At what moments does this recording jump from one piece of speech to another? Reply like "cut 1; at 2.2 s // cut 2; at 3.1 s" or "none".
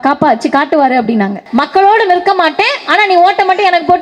cut 1; at 1.4 s